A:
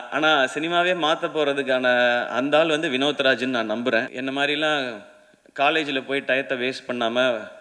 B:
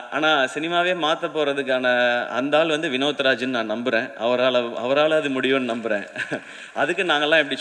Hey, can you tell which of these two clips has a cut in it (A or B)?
A